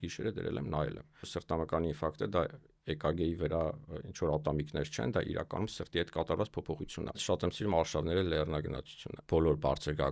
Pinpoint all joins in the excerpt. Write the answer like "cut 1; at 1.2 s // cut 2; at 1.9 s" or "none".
cut 1; at 1.2 s // cut 2; at 7.2 s // cut 3; at 9.1 s